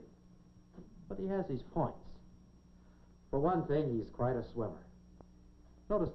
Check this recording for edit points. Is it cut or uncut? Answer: uncut